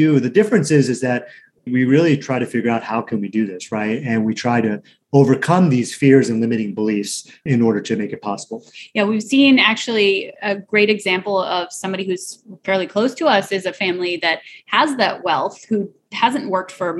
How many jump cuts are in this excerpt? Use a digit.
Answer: 0